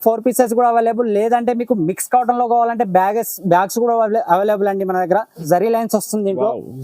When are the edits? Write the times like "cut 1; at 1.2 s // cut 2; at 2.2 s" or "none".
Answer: cut 1; at 5.4 s